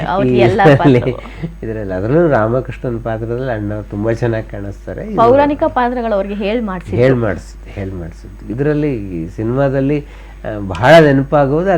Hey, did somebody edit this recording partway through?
no; 0 cuts

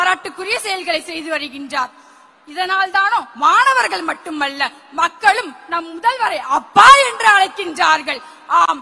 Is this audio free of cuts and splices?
yes; 0 cuts

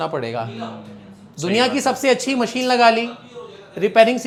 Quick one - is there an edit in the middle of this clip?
no; 0 cuts

